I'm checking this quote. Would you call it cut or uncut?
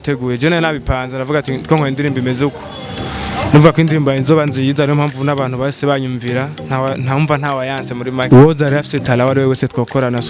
cut